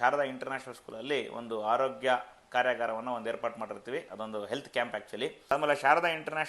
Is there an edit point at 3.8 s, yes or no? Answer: no